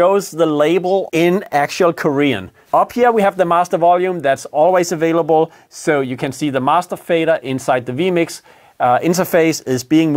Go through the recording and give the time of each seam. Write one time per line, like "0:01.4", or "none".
0:01.1
0:02.5